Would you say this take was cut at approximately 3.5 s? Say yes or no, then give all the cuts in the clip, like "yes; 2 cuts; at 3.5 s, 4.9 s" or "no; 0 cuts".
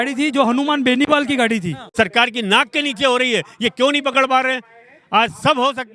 no; 1 cut; at 1.8 s